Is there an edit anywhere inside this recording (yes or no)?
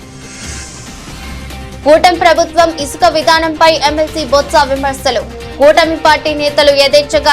yes